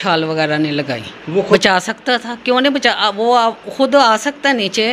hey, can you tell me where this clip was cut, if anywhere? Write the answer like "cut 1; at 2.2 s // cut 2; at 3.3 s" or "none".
cut 1; at 1.5 s